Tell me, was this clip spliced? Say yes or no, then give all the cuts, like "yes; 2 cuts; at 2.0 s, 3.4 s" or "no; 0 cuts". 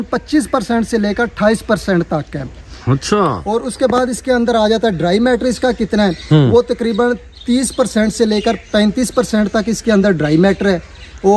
no; 0 cuts